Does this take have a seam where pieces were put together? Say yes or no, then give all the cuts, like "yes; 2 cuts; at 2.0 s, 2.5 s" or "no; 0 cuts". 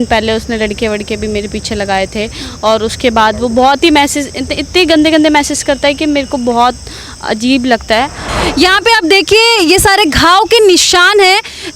yes; 1 cut; at 8.2 s